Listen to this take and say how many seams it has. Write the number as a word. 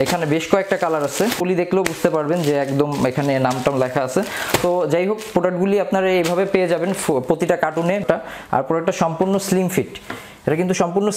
two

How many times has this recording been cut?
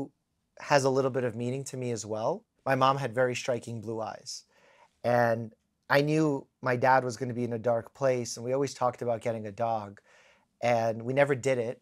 one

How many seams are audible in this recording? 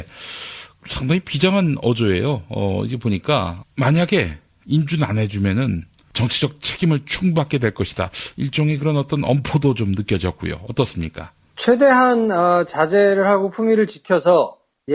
one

